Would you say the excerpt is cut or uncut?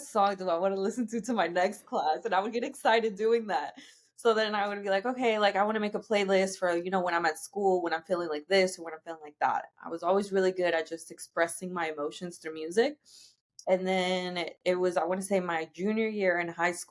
uncut